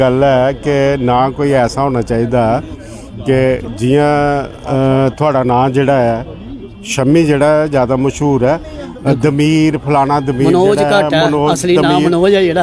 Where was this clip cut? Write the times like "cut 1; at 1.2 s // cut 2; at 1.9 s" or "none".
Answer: none